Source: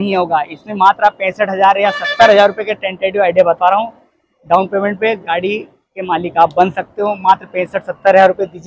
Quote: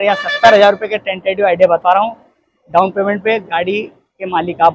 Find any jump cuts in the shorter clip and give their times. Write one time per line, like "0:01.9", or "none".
none